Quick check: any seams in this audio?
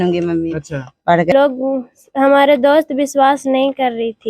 yes; 1 cut; at 1.3 s

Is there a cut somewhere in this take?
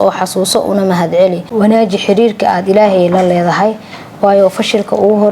yes; 1 cut; at 1.4 s

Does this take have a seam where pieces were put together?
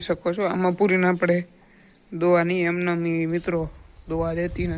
no; 0 cuts

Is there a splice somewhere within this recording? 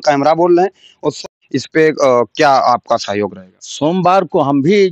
yes; 1 cut; at 1.2 s

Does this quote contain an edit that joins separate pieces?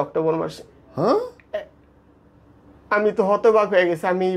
no; 0 cuts

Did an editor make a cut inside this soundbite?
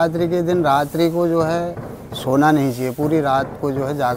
no; 0 cuts

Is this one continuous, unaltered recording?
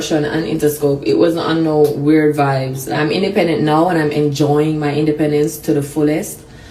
no; 1 cut; at 2.8 s

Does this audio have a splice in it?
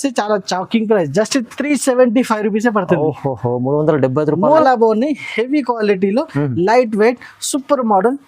yes; 1 cut; at 4.6 s

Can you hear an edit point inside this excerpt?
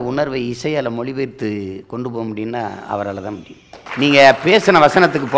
yes; 1 cut; at 3.8 s

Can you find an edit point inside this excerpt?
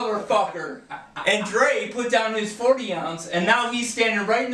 no; 0 cuts

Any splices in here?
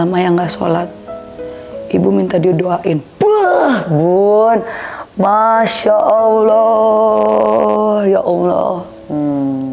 no; 0 cuts

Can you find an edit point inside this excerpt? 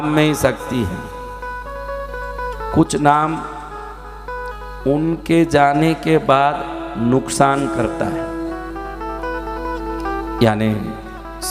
no; 0 cuts

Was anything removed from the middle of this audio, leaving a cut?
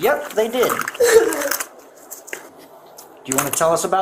yes; 1 cut; at 2.5 s

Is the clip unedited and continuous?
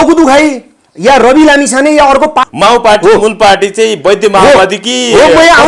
no; 1 cut; at 2.4 s

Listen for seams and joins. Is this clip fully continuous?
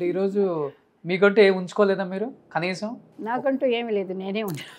yes; 0 cuts

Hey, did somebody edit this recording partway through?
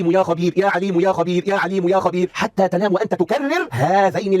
no; 0 cuts

